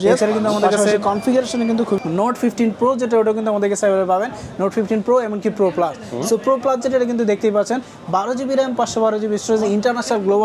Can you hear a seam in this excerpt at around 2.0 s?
yes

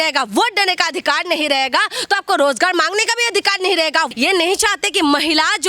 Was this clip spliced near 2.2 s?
no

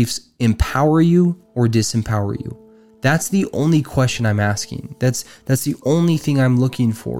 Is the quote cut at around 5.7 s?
no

